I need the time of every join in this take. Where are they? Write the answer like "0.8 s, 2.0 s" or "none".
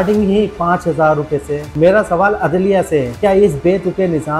1.7 s